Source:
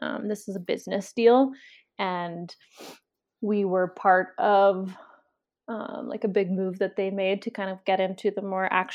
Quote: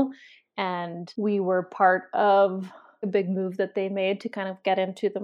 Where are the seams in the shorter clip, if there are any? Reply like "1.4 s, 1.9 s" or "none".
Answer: 1.0 s, 3.0 s